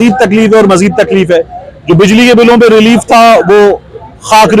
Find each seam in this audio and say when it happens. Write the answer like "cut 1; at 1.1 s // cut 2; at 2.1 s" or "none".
none